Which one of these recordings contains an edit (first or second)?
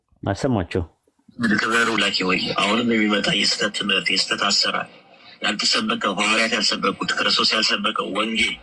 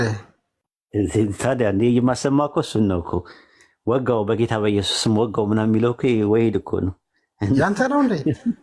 first